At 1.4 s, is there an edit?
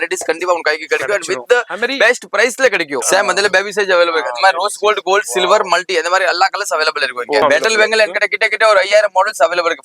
no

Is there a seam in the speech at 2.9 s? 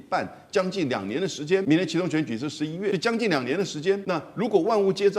yes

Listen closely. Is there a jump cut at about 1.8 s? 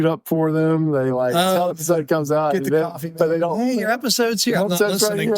yes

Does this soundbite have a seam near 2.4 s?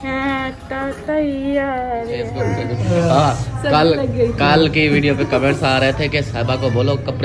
yes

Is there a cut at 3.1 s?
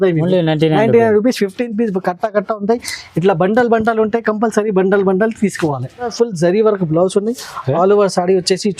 no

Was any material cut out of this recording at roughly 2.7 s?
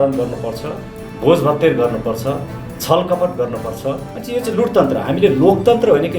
no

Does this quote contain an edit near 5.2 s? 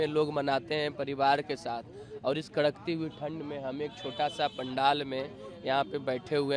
no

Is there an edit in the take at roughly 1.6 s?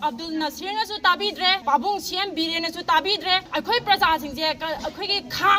yes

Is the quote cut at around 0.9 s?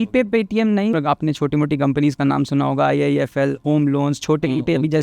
yes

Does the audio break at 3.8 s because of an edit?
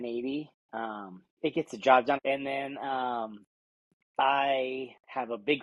no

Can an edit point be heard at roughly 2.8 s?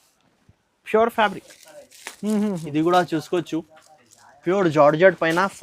no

